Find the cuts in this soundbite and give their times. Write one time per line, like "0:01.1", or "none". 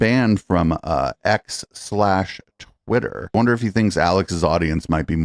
0:03.3